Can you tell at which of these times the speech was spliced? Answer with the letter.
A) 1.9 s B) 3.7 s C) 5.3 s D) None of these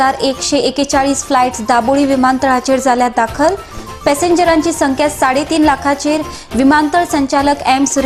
D